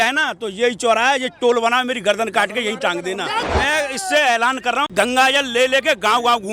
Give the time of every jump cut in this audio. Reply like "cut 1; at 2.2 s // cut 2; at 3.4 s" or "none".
cut 1; at 3.4 s // cut 2; at 4.9 s